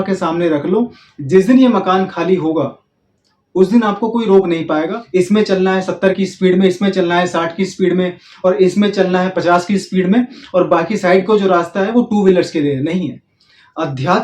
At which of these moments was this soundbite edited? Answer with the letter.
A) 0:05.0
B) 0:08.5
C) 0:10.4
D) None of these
A